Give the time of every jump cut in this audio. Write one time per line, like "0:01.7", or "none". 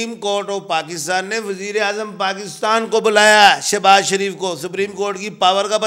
none